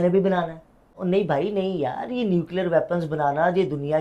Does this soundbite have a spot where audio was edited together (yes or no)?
yes